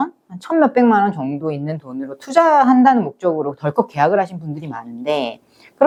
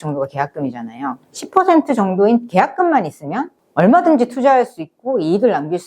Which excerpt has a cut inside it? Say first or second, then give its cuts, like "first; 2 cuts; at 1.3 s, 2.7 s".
second; 1 cut; at 3.6 s